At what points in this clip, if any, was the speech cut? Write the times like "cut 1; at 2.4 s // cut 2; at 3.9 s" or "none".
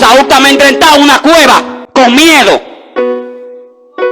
cut 1; at 1.8 s